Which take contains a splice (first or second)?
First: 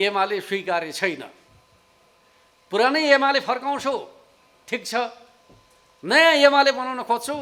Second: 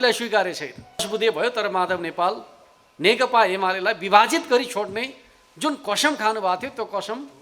second